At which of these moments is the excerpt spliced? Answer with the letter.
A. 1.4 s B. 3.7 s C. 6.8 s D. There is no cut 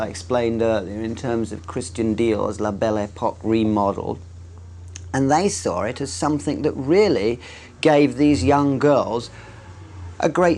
A